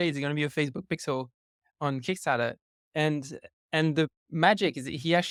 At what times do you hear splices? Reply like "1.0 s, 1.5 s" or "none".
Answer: none